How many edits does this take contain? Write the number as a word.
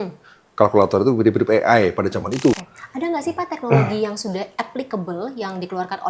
one